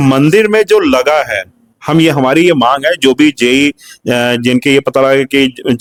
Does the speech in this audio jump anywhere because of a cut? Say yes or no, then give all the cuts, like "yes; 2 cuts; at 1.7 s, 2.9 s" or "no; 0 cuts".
no; 0 cuts